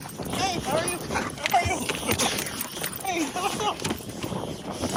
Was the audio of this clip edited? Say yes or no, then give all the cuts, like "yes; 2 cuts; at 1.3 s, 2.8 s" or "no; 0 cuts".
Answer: no; 0 cuts